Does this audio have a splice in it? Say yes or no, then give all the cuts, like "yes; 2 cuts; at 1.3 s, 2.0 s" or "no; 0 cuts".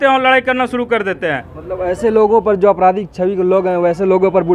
yes; 1 cut; at 1.5 s